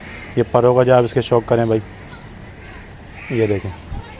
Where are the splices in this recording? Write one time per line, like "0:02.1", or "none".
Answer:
none